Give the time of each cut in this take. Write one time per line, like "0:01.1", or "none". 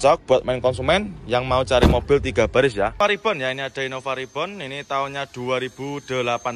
0:03.0